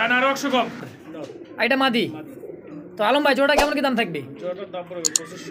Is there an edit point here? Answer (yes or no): yes